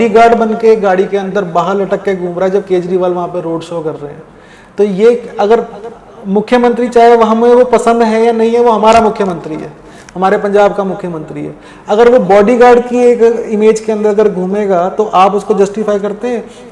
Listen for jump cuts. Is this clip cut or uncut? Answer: uncut